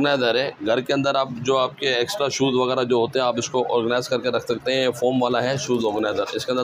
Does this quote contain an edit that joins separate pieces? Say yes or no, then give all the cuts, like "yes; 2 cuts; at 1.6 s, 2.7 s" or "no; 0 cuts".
no; 0 cuts